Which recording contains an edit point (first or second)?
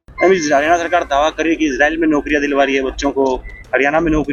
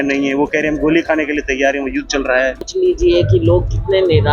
second